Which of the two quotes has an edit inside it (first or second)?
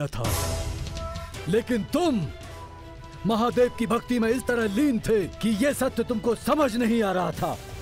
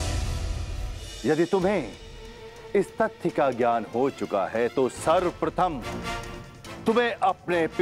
second